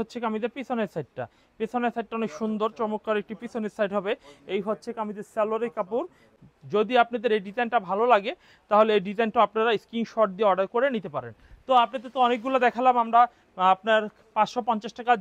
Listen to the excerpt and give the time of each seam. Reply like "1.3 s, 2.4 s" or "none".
none